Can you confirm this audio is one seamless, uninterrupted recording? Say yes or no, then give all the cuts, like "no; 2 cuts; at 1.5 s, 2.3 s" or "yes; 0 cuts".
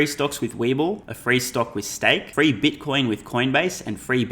no; 2 cuts; at 1.1 s, 2.3 s